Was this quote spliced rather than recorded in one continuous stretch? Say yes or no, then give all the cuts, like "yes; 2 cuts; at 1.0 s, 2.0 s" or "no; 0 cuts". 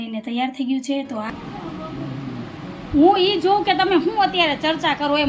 yes; 1 cut; at 1.3 s